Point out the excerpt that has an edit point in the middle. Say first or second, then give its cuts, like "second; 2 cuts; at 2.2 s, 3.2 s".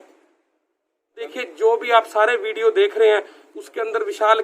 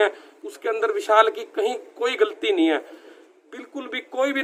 first; 1 cut; at 1.3 s